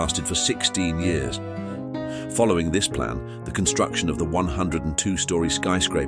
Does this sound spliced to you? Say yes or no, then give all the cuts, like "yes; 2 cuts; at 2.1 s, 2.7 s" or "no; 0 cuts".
yes; 1 cut; at 1.7 s